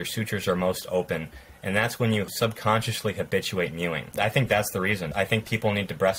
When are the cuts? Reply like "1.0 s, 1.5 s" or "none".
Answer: 2.3 s, 4.1 s, 5.1 s